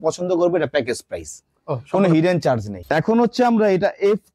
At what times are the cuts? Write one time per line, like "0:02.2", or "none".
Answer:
0:02.8